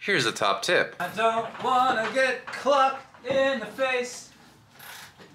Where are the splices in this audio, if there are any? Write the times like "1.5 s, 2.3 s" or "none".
0.9 s